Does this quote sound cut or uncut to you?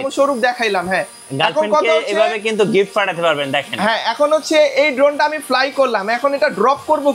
uncut